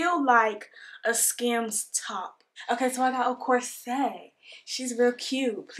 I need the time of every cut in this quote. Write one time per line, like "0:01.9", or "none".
0:02.4